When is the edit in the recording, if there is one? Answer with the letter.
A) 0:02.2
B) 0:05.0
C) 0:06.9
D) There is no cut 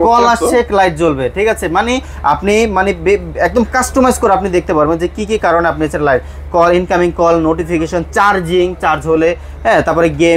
D